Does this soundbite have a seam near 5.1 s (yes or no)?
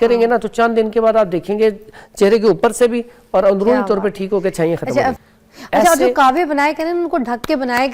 yes